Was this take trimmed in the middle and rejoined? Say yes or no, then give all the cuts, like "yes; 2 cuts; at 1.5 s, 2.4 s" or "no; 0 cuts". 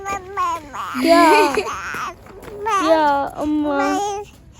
no; 0 cuts